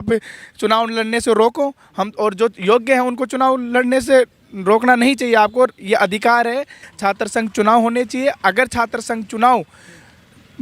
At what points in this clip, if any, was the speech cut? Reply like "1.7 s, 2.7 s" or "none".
6.9 s

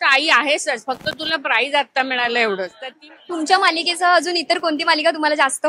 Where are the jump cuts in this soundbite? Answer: 2.8 s

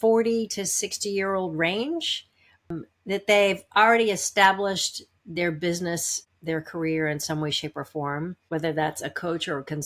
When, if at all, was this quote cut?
2.7 s

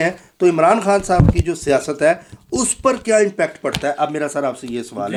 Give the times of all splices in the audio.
none

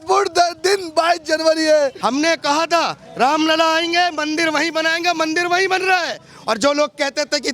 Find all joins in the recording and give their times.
2.0 s

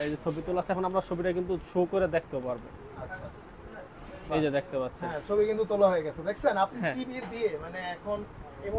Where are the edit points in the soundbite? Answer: none

